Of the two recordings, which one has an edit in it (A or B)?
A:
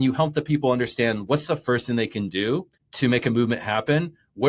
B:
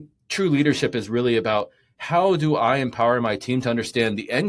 A